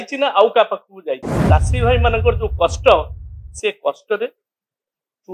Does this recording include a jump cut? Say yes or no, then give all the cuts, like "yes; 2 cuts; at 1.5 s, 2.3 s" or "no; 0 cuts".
yes; 1 cut; at 1.3 s